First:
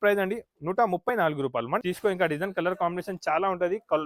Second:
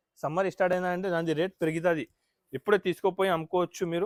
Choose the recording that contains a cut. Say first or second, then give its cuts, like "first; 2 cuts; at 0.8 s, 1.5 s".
first; 1 cut; at 1.8 s